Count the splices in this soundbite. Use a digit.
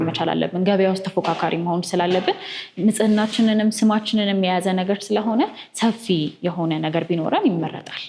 0